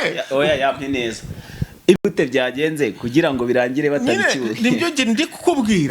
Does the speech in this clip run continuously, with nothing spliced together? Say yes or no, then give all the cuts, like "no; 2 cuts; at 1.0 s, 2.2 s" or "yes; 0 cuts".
yes; 0 cuts